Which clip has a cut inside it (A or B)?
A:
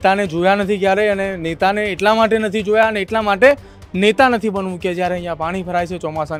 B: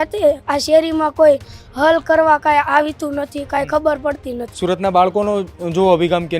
B